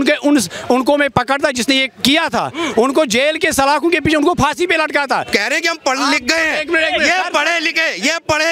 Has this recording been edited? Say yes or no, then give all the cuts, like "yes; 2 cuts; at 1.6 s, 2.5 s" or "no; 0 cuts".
yes; 1 cut; at 5.2 s